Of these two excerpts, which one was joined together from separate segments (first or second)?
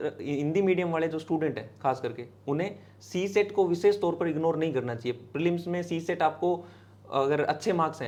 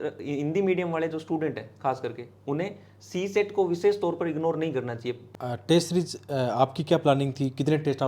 second